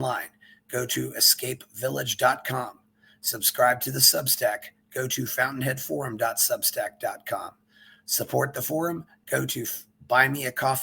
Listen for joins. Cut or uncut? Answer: uncut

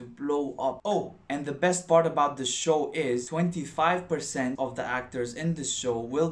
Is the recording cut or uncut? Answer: cut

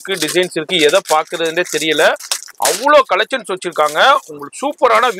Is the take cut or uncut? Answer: uncut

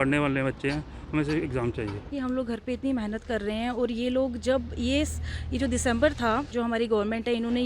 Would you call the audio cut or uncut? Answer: cut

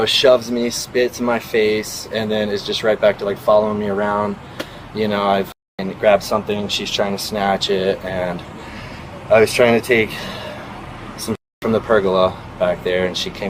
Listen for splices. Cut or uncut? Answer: uncut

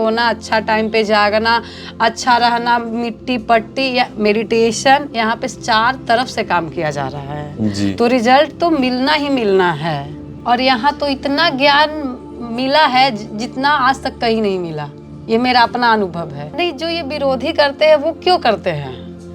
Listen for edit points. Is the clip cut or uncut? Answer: cut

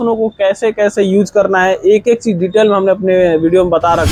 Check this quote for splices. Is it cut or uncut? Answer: uncut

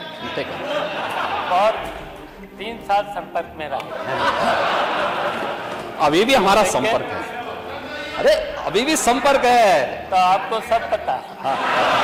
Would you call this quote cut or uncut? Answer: uncut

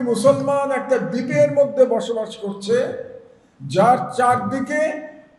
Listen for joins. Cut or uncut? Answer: uncut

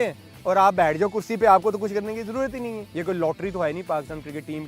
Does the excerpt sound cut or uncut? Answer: cut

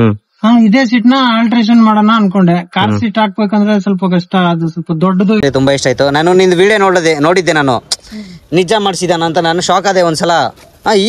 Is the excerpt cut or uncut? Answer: cut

